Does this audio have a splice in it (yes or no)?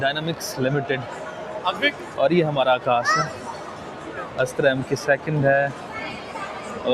no